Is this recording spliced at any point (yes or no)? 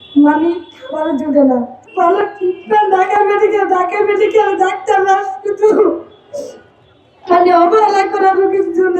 yes